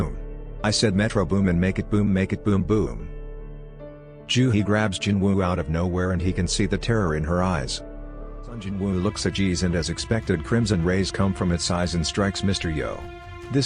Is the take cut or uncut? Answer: cut